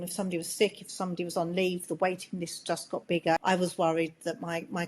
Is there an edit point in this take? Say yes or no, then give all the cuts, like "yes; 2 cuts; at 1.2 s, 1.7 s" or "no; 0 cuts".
yes; 1 cut; at 3.4 s